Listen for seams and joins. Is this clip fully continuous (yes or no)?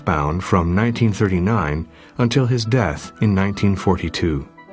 no